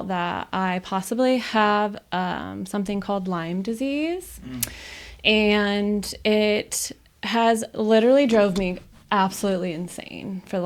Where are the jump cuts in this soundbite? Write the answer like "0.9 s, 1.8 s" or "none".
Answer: none